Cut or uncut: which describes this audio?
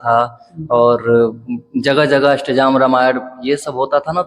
uncut